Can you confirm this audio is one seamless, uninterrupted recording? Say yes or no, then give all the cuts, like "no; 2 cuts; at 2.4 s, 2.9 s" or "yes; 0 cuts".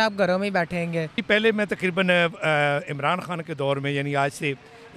no; 1 cut; at 1.2 s